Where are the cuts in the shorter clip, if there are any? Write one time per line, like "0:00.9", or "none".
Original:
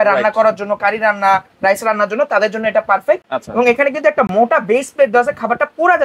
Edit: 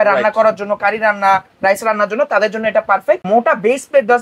0:03.2

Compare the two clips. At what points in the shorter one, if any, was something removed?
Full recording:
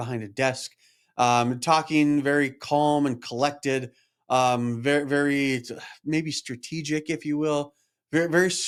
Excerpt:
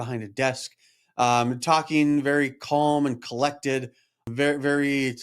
0:04.2

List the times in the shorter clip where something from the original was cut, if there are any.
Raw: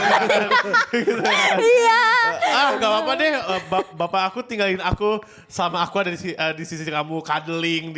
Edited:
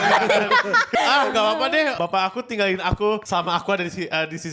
0:00.9
0:01.9
0:03.2

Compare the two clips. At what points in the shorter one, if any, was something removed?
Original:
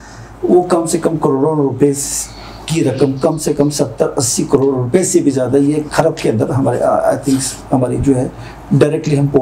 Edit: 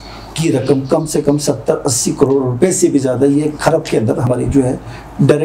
0:04.3

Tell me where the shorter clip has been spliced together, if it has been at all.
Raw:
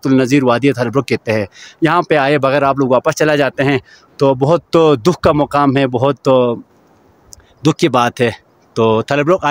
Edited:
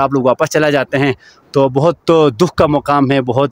none

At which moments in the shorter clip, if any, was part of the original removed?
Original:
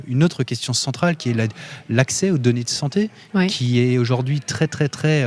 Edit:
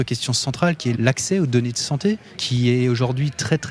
0:00.9
0:02.4

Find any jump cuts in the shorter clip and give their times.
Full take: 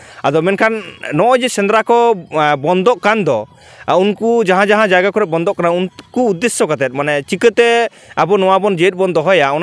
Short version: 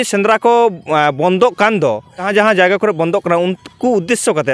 0:02.3

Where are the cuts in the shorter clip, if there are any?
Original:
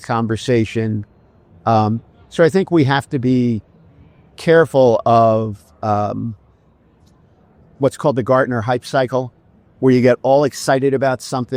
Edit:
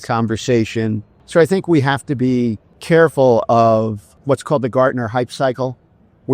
0:01.1
0:02.7
0:04.1

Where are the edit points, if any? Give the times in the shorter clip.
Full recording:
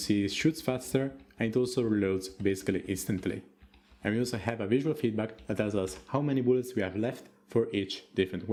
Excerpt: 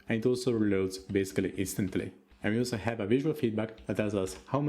0:02.2

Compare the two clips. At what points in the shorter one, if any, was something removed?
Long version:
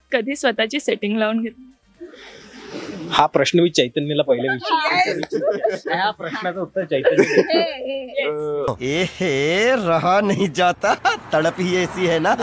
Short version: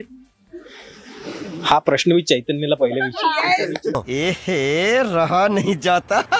0:03.9

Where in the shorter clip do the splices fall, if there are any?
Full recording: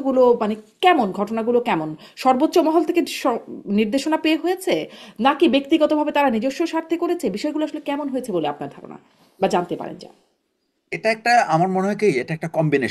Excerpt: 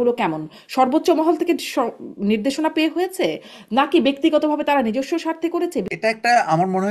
0:05.9

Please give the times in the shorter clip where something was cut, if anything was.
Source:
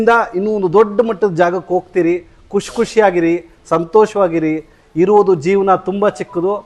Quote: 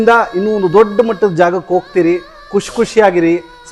none

